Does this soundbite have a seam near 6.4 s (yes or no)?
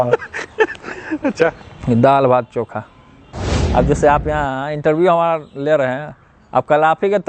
no